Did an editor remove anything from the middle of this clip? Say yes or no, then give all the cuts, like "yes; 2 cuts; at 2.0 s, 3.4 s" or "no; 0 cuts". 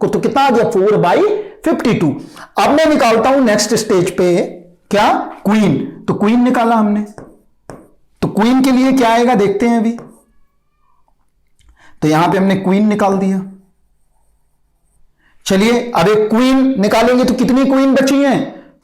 no; 0 cuts